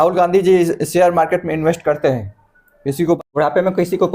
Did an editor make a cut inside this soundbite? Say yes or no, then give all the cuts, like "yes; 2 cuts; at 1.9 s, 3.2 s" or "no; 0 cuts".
yes; 1 cut; at 3.2 s